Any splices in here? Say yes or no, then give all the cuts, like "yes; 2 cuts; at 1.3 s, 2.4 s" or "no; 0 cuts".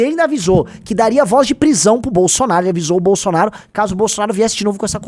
no; 0 cuts